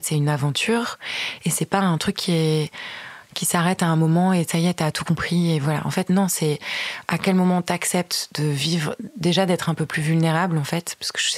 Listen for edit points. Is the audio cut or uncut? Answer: uncut